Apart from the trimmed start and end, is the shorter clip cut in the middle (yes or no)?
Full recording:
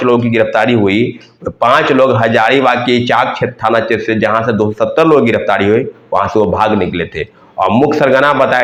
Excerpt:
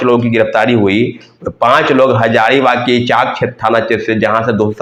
no